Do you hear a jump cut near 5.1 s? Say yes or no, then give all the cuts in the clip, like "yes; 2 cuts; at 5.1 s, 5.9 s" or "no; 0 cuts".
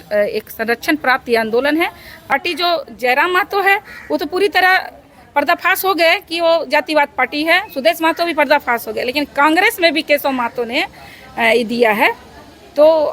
no; 1 cut; at 2.2 s